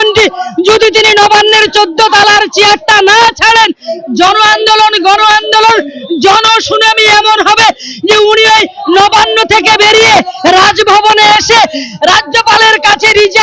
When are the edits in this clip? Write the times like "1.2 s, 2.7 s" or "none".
none